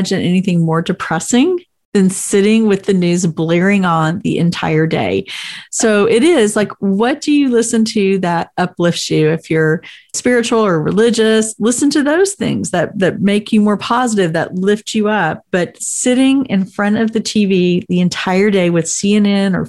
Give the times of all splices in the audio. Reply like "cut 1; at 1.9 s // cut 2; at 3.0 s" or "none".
cut 1; at 10.1 s